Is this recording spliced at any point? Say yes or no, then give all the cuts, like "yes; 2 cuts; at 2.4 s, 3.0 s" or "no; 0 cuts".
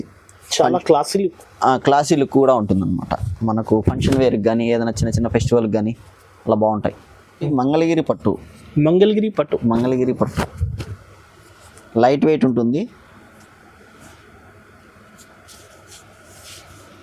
yes; 1 cut; at 7.5 s